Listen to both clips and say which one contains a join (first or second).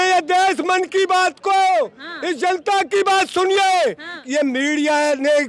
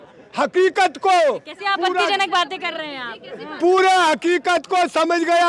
first